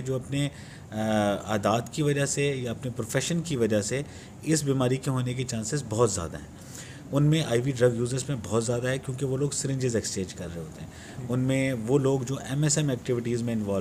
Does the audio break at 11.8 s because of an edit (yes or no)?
no